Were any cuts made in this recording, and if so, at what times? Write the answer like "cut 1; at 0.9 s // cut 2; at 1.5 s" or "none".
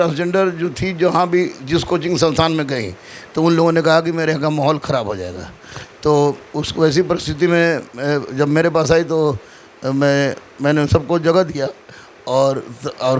none